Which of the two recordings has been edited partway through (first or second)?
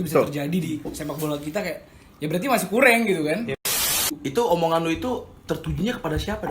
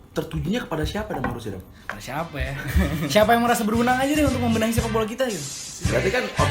first